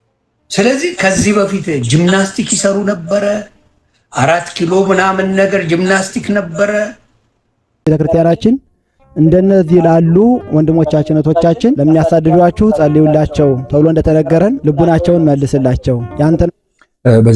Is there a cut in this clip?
yes; 1 cut; at 7.9 s

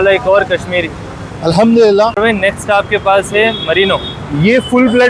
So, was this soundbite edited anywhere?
yes; 1 cut; at 2.2 s

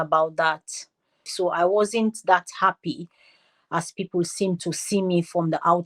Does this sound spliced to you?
yes; 1 cut; at 1.3 s

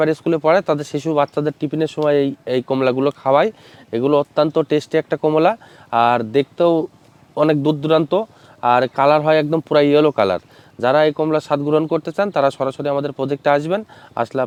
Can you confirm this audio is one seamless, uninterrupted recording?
yes; 0 cuts

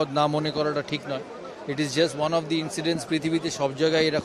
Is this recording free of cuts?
no; 1 cut; at 1.4 s

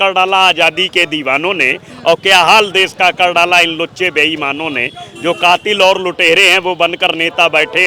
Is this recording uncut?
yes; 0 cuts

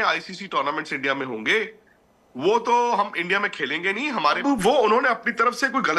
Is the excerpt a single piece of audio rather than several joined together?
no; 1 cut; at 4.4 s

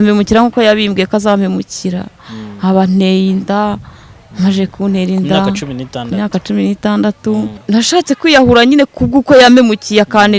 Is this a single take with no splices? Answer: no; 1 cut; at 7.6 s

